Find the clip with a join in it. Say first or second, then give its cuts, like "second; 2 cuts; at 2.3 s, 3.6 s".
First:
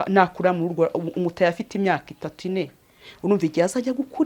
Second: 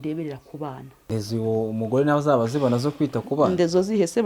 second; 1 cut; at 1.1 s